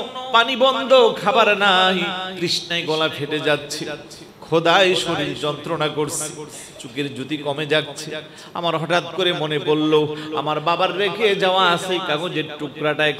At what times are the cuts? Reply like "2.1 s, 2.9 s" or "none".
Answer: 2.3 s